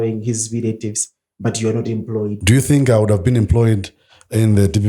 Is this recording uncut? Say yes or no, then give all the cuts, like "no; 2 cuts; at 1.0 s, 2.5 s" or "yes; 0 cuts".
no; 1 cut; at 2.4 s